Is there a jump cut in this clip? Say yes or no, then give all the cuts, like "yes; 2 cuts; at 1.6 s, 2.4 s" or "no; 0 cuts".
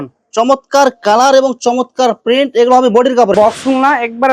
yes; 1 cut; at 3.3 s